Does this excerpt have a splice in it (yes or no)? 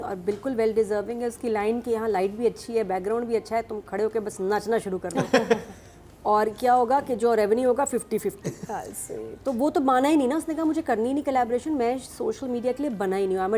no